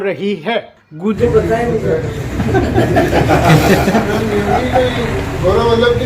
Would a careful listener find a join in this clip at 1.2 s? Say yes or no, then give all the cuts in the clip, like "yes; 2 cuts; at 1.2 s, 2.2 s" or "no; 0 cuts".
yes; 1 cut; at 1.2 s